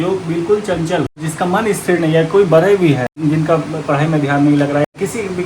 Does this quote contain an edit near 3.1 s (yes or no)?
yes